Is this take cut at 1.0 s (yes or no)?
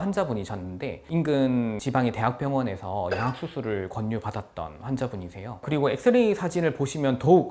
no